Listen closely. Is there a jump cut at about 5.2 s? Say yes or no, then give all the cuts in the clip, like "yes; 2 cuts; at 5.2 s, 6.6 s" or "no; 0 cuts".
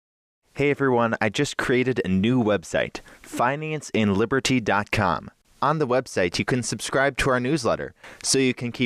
yes; 1 cut; at 5.2 s